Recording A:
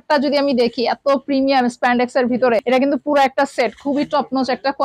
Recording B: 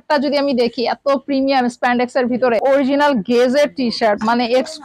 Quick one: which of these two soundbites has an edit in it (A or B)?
B